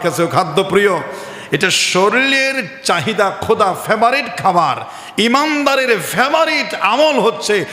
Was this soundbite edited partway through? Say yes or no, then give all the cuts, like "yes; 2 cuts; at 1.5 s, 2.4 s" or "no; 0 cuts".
no; 0 cuts